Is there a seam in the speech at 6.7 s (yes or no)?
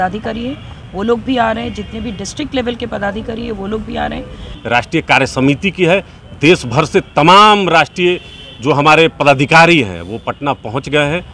no